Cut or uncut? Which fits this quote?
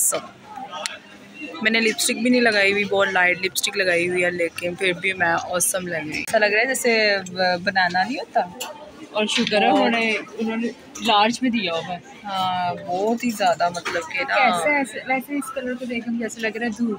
cut